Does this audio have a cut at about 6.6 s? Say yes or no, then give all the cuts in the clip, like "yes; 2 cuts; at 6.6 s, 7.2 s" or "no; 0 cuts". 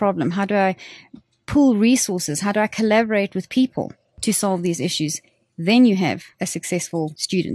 yes; 1 cut; at 6.6 s